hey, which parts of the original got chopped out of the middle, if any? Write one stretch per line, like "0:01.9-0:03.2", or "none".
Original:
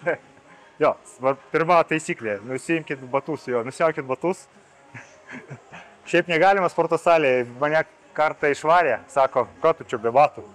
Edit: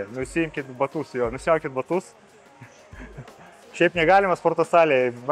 none

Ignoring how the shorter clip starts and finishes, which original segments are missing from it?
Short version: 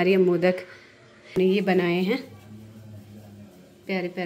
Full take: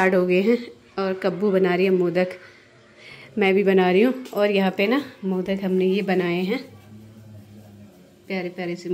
0:03.1-0:05.7

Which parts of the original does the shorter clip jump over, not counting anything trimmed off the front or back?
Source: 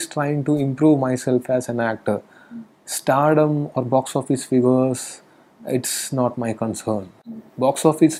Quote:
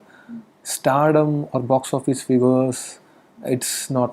none

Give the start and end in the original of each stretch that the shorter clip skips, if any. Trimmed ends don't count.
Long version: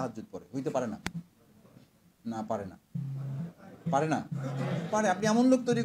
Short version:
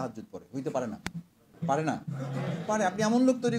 0:01.4-0:03.7

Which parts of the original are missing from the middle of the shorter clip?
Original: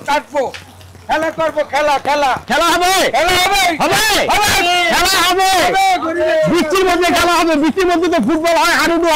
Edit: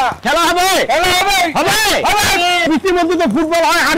0:04.9-0:07.6

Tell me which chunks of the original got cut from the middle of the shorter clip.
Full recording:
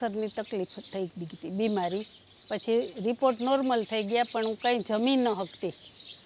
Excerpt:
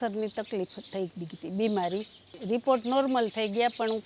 0:02.4-0:02.9

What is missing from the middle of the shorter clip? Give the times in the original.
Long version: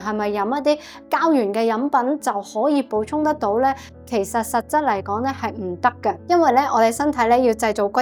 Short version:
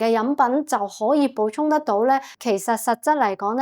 0:03.9-0:04.0

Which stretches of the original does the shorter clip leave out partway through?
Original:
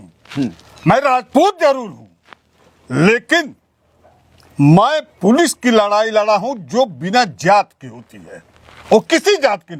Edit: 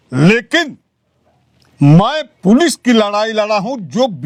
none

